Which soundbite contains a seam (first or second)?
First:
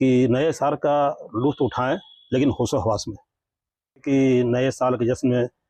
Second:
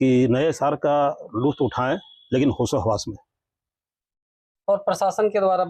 first